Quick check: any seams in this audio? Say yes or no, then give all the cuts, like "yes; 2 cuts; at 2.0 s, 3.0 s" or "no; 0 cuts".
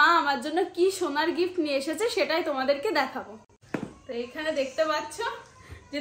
no; 0 cuts